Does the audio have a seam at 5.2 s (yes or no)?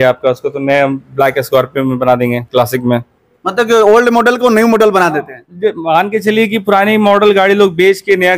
no